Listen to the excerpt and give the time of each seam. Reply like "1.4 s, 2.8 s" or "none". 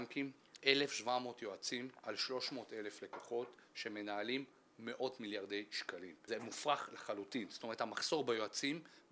6.1 s